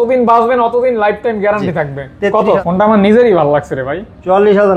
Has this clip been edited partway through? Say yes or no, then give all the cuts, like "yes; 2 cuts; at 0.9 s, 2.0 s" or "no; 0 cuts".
yes; 1 cut; at 2.6 s